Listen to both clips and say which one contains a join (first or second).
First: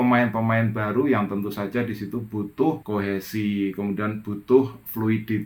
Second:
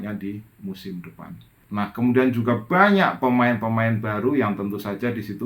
second